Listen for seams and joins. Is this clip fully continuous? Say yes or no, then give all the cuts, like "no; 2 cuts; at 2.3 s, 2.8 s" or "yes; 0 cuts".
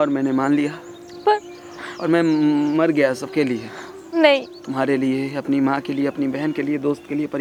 yes; 0 cuts